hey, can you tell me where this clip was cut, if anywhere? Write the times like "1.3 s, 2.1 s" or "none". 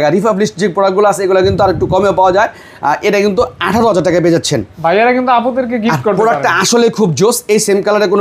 none